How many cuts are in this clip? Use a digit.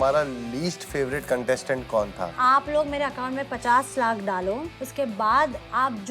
2